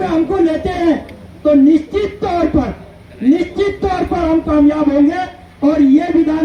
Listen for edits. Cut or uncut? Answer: uncut